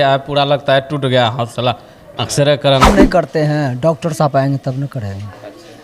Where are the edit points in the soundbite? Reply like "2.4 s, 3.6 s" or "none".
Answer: 2.9 s